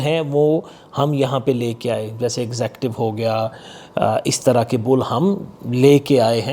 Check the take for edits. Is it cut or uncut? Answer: uncut